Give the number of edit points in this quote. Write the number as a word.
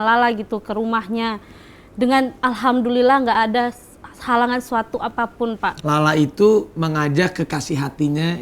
one